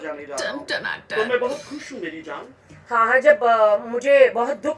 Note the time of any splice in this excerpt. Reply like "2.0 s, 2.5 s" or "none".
none